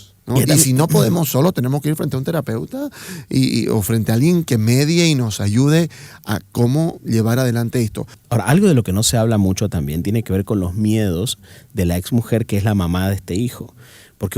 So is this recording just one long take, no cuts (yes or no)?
no